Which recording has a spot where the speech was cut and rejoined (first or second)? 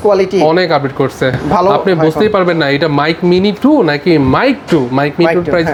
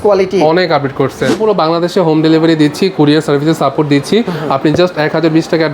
second